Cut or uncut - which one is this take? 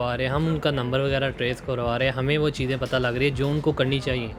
uncut